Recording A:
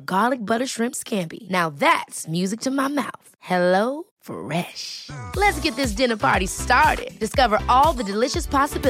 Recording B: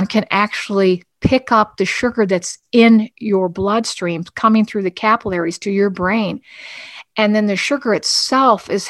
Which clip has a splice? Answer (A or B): B